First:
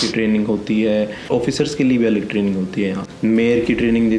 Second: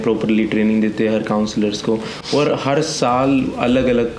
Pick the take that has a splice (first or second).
first